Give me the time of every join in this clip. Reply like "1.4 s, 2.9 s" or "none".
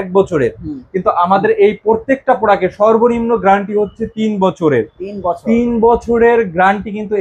none